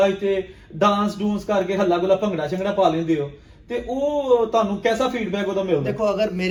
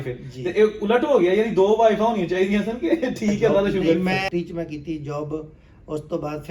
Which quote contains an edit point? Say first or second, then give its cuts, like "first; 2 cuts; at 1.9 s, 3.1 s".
second; 1 cut; at 4.2 s